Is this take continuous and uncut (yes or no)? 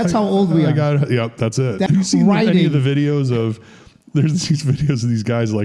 no